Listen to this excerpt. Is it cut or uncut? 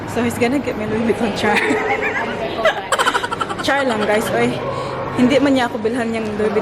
uncut